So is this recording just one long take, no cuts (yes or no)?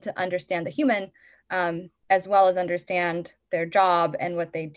yes